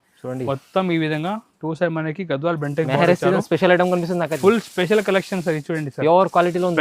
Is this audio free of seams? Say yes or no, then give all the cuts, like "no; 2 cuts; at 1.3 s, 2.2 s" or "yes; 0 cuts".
yes; 0 cuts